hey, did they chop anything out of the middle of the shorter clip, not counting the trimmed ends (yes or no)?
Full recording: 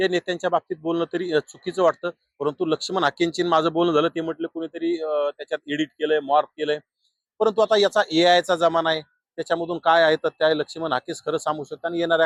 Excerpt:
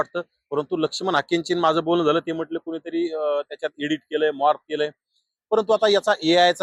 no